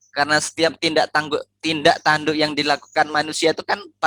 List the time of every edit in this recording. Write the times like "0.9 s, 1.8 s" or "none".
none